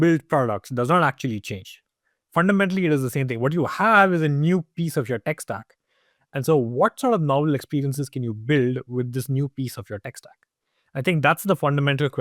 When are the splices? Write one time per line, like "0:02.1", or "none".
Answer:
none